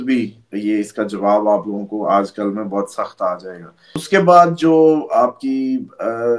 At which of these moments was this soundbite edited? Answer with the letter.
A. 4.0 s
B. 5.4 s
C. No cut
A